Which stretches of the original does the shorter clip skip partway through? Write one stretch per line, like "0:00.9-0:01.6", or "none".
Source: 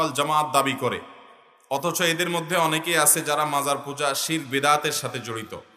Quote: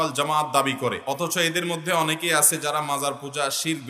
0:01.0-0:01.6

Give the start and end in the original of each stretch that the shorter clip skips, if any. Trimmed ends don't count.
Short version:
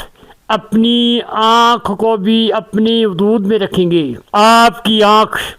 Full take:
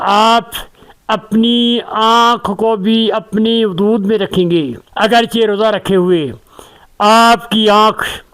0:04.8-0:06.8

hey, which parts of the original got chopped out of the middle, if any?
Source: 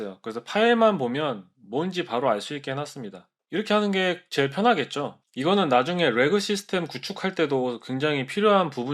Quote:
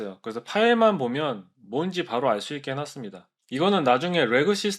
0:03.3-0:05.2

